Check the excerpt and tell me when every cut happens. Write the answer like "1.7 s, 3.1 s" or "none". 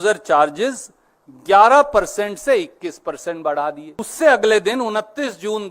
4.0 s